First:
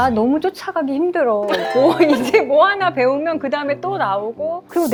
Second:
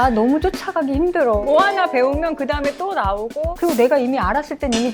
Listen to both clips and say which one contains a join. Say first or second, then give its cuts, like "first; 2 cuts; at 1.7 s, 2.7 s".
second; 2 cuts; at 1.4 s, 3.5 s